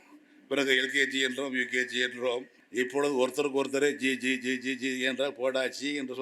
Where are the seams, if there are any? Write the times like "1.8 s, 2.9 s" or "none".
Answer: 2.6 s